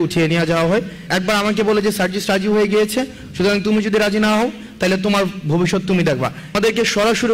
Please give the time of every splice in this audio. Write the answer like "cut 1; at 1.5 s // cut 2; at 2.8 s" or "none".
cut 1; at 1.0 s // cut 2; at 6.6 s